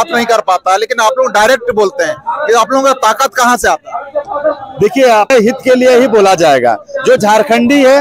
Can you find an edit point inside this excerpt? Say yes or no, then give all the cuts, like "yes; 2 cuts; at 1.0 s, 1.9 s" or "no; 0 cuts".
yes; 1 cut; at 5.3 s